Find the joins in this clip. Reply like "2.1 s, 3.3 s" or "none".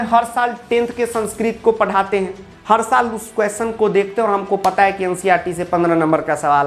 none